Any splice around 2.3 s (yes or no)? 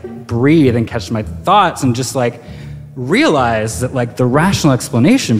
no